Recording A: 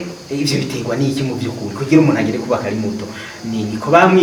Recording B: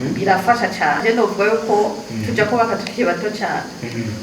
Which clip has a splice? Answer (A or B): B